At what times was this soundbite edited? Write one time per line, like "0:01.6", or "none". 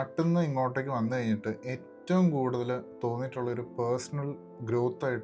none